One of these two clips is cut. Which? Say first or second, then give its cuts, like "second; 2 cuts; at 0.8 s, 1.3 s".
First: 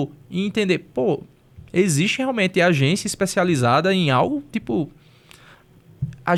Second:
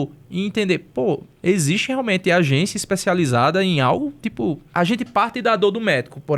second; 2 cuts; at 1.3 s, 4.6 s